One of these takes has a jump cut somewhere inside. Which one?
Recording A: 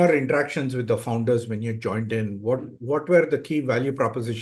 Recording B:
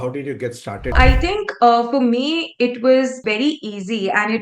B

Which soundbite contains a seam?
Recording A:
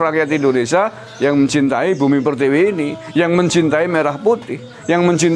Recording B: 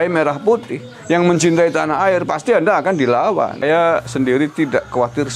B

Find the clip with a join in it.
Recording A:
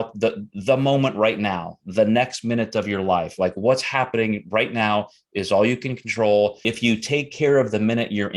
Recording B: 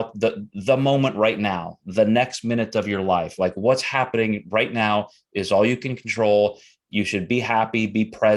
A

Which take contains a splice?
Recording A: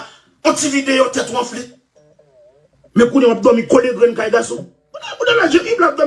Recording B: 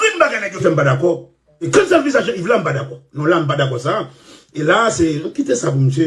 B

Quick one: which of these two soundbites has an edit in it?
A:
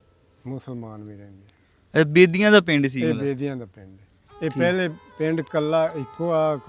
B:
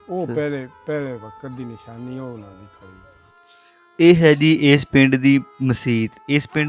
B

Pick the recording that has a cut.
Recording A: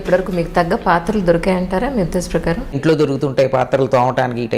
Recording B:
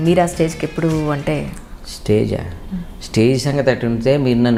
A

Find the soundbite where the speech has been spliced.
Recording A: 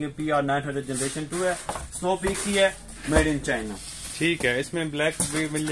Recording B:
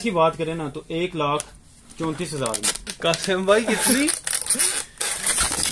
B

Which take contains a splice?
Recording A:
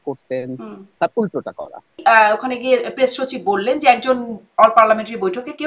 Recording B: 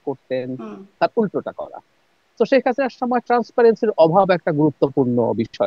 A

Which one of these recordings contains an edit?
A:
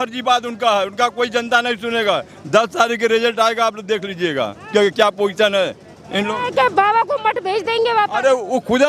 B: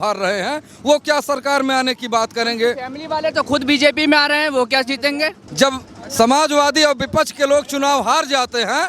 B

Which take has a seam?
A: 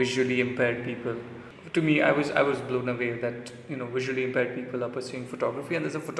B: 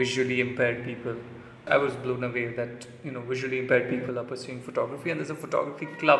B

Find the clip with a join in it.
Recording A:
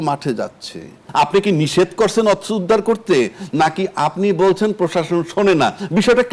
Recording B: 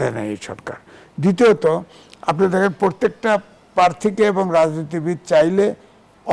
A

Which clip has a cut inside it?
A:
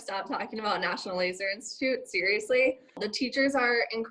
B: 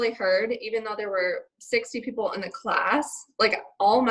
A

